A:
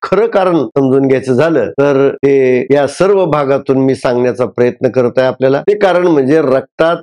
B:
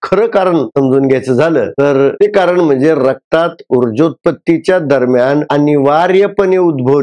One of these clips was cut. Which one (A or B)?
B